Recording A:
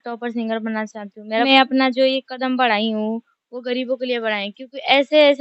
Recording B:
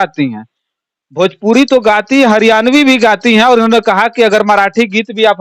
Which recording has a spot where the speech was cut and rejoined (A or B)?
A